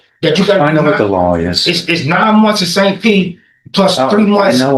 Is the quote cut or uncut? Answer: uncut